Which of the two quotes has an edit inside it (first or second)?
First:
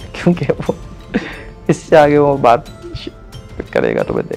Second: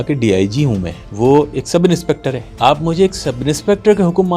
second